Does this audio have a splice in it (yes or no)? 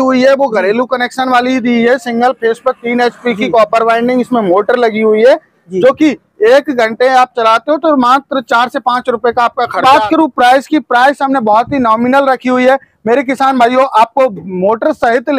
yes